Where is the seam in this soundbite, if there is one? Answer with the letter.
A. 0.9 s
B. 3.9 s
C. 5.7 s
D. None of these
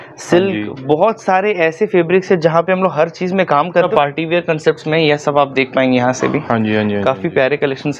B